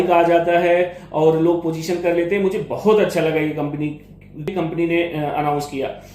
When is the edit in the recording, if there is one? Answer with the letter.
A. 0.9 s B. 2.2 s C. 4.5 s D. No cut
C